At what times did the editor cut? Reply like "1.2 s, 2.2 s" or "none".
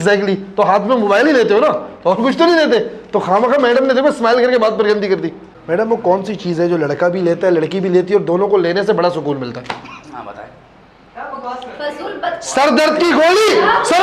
5.5 s